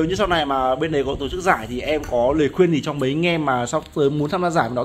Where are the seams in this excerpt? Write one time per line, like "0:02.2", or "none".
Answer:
none

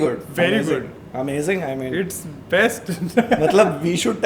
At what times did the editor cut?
none

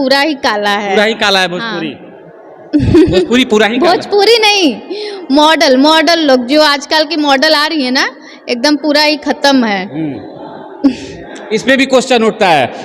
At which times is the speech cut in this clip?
none

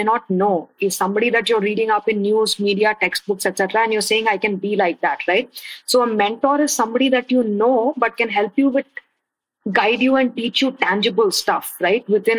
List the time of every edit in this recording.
none

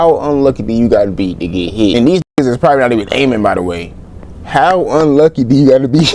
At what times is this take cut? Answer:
0:01.9

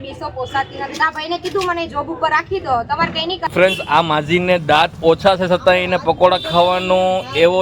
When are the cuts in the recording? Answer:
0:03.5

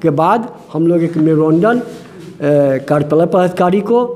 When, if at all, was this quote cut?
none

